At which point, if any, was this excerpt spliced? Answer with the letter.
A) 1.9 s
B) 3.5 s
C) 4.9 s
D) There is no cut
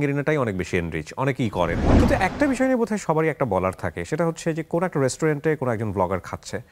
A